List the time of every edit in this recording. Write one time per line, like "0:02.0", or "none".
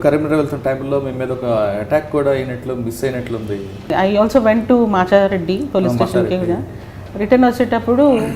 0:03.9